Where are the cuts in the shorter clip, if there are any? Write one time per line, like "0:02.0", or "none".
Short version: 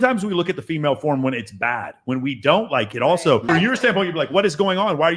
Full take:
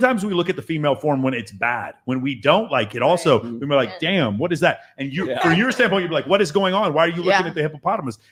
0:03.4